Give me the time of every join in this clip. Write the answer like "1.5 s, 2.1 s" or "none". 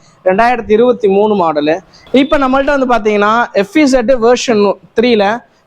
1.9 s